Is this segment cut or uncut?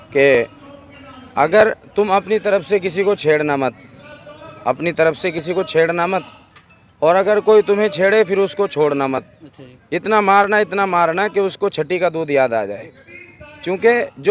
uncut